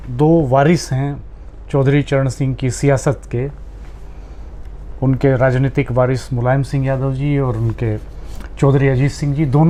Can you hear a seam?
no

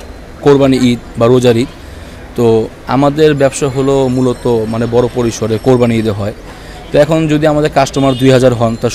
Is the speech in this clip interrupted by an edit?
no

